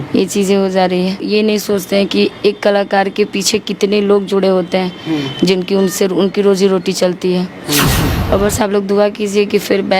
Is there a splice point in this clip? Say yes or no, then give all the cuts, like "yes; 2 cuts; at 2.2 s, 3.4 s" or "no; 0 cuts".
yes; 2 cuts; at 1.2 s, 8.1 s